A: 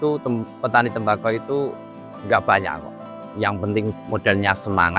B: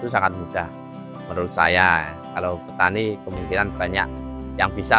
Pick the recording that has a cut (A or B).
A